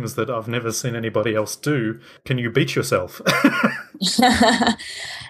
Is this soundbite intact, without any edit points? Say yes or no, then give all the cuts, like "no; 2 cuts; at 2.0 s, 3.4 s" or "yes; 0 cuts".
no; 1 cut; at 2.2 s